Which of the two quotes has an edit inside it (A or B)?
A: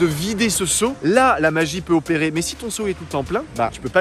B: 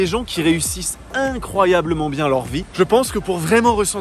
B